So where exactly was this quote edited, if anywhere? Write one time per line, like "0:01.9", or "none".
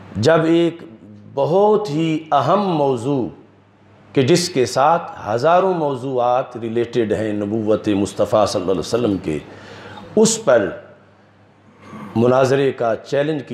none